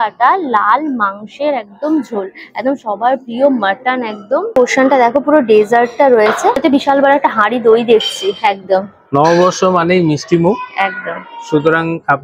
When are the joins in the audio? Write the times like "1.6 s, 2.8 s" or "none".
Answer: none